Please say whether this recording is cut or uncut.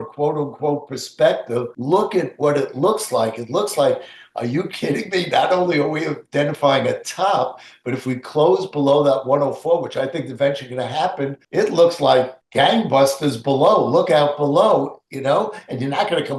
cut